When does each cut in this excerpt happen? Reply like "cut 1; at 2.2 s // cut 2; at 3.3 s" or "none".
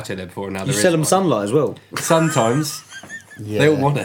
none